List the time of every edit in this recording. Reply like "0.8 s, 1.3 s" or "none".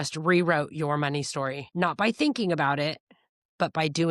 1.6 s